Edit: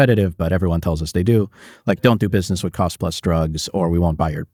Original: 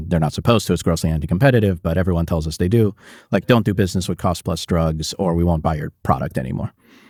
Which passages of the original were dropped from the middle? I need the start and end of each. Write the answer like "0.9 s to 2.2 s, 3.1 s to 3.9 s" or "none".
none